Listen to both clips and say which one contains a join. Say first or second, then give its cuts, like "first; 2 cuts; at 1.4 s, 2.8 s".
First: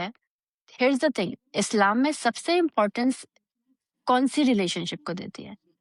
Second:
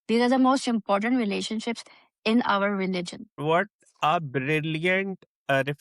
second; 1 cut; at 3.3 s